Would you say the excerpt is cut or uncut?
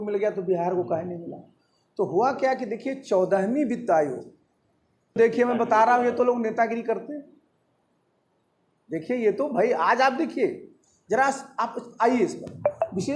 cut